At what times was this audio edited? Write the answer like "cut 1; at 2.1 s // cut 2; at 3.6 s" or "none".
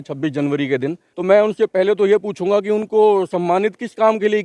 cut 1; at 1.1 s